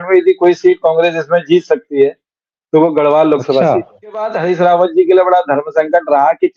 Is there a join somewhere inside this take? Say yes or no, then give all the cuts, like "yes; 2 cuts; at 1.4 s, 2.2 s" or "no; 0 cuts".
yes; 1 cut; at 4.3 s